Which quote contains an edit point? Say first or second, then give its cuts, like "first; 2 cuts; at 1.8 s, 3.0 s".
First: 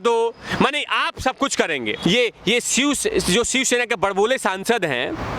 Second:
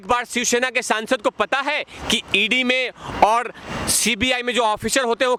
first; 1 cut; at 2.0 s